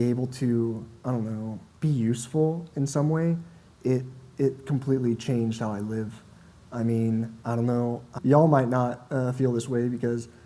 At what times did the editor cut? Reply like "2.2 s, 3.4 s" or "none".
none